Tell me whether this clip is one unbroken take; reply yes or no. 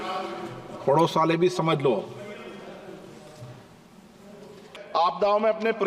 no